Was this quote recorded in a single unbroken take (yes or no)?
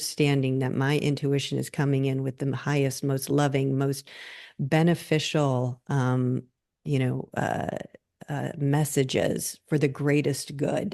yes